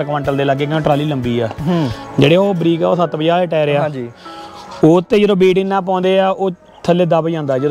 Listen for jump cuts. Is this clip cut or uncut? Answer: uncut